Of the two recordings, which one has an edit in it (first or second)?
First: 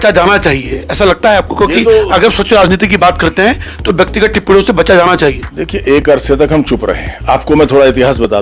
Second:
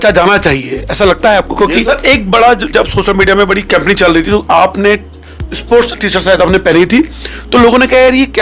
second